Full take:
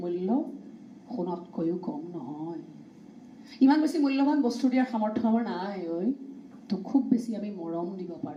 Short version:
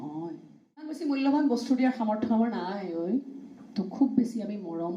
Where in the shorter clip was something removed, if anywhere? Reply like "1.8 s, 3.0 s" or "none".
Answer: 1.0 s